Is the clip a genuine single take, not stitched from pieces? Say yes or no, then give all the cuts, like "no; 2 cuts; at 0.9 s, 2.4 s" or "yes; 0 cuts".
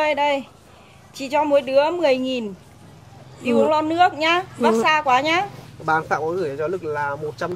no; 1 cut; at 5.6 s